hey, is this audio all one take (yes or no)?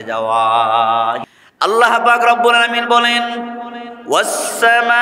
no